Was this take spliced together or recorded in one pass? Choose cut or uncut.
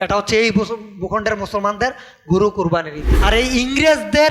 cut